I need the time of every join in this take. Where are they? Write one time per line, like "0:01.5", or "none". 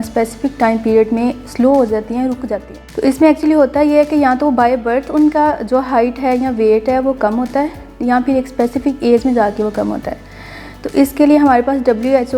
0:02.8